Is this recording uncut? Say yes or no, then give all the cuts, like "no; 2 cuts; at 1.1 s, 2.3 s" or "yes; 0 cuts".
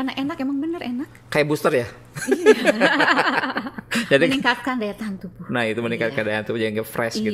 yes; 0 cuts